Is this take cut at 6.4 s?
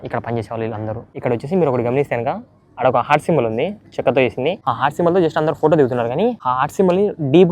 yes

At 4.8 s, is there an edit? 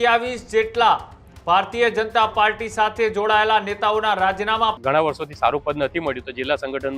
yes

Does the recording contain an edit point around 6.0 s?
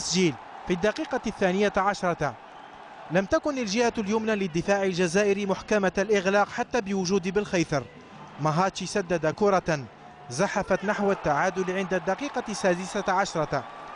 no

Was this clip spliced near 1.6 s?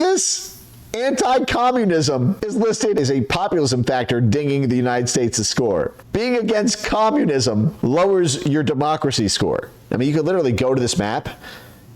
no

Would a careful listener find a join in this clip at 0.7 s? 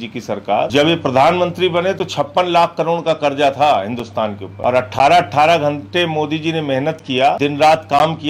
yes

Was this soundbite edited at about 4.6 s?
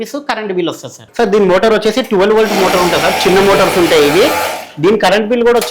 no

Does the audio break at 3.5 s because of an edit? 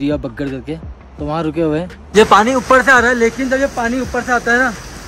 no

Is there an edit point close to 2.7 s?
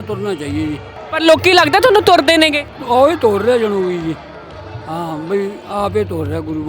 yes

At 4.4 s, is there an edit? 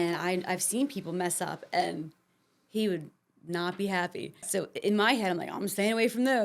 yes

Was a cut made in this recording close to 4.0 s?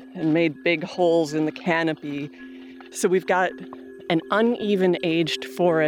yes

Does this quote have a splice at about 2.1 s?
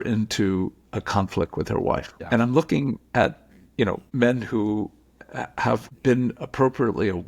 yes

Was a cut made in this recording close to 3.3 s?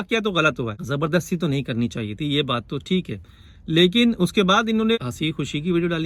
no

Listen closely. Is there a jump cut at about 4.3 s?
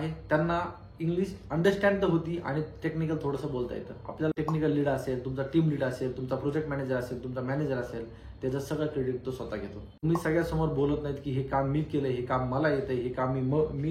yes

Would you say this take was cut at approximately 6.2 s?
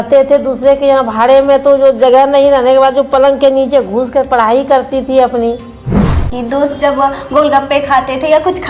yes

